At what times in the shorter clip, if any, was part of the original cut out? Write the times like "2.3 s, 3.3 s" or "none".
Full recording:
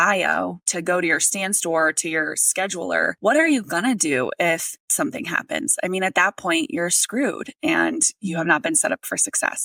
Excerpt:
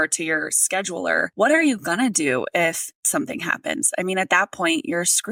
none